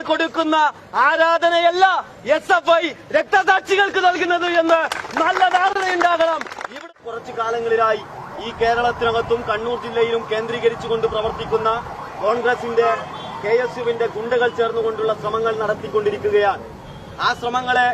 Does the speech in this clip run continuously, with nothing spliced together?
no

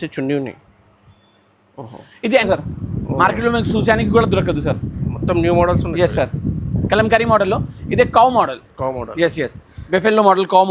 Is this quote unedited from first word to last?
no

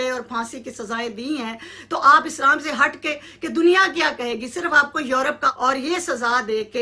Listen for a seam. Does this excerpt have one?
yes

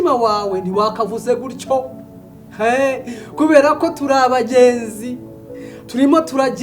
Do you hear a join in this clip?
no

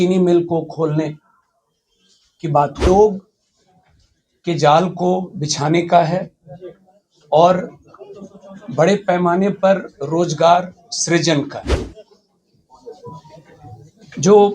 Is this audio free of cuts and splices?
no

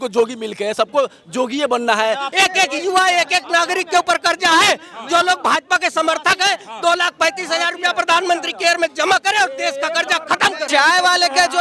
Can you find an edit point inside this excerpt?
yes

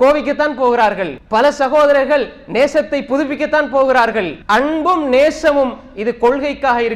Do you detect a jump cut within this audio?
yes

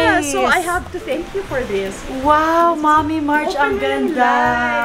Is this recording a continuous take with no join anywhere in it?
yes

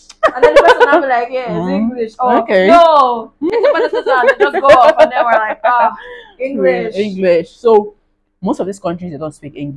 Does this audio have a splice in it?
no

